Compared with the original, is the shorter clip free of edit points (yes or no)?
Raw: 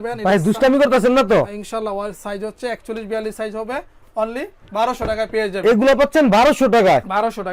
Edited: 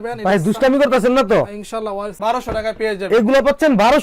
no